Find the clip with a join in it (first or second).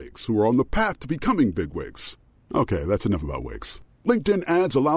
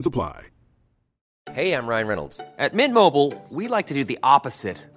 second